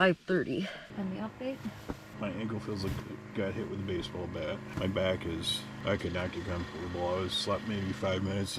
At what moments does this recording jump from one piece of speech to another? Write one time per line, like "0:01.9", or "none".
0:00.8
0:02.1
0:04.7
0:05.7